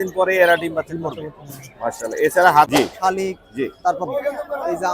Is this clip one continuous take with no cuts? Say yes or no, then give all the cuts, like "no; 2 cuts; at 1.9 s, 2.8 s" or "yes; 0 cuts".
no; 1 cut; at 2.7 s